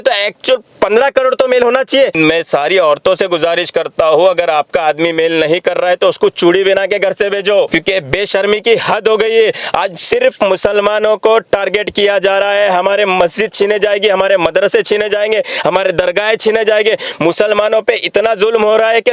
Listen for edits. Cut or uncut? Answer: cut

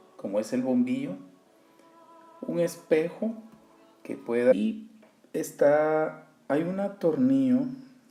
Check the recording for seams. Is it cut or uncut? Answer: uncut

